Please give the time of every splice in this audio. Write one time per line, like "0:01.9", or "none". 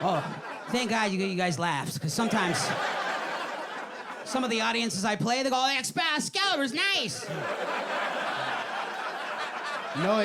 none